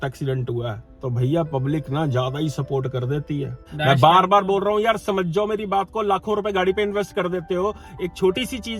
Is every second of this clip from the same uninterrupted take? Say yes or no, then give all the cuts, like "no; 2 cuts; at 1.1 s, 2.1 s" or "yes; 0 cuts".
no; 1 cut; at 3.7 s